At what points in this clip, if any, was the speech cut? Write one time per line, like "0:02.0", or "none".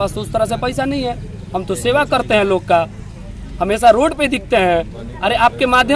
none